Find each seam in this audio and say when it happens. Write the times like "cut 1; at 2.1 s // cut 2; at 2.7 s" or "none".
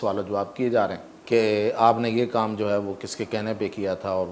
cut 1; at 1.1 s